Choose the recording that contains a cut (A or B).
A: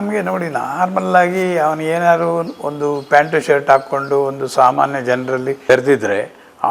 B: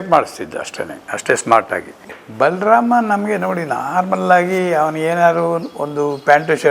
B